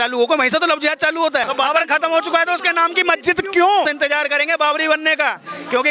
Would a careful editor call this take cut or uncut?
cut